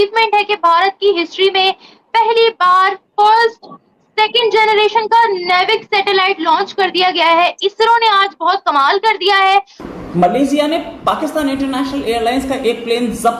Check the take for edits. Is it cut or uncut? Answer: cut